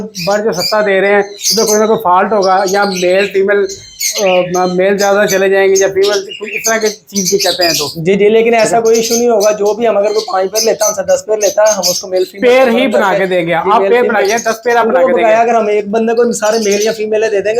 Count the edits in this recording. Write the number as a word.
zero